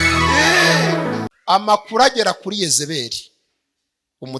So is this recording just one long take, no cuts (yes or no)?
no